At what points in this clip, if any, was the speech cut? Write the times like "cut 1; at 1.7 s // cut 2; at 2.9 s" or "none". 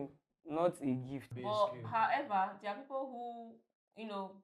cut 1; at 1.3 s